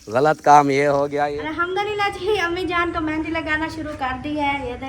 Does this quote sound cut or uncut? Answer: cut